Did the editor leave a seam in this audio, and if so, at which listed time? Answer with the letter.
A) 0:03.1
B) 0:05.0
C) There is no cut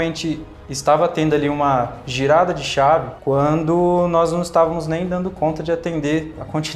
A